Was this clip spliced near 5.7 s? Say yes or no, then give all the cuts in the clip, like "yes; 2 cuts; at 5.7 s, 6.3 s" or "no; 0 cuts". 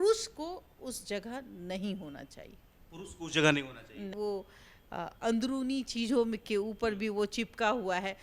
no; 1 cut; at 4.1 s